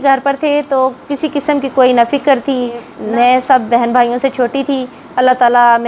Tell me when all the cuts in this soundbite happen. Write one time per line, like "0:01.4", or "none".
0:02.9
0:05.0